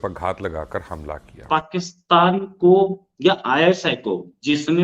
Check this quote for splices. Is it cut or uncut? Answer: cut